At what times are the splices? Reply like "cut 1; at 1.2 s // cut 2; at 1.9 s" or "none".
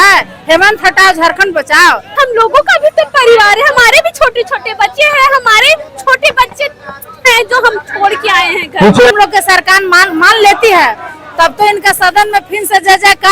cut 1; at 2.1 s // cut 2; at 9.1 s